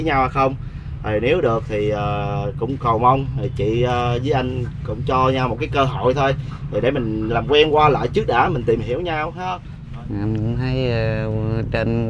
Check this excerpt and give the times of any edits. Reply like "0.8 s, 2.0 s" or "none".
9.4 s